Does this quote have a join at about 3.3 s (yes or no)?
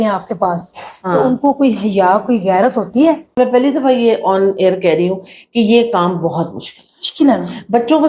yes